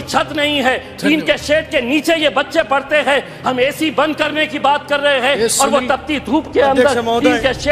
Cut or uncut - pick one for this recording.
uncut